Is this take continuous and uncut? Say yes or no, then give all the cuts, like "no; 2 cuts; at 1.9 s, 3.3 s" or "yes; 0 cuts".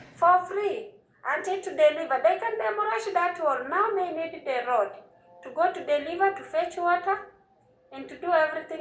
yes; 0 cuts